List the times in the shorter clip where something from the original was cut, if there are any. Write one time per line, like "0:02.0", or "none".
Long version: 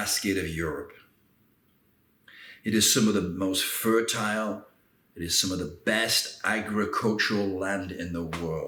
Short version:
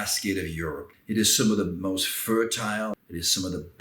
0:00.9
0:03.0